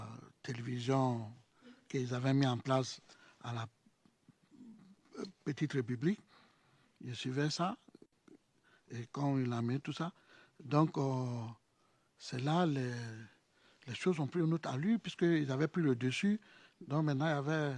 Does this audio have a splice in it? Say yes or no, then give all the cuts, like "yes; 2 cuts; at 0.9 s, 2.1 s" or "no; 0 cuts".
no; 0 cuts